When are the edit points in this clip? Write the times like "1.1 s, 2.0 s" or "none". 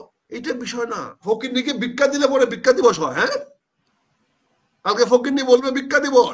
1.2 s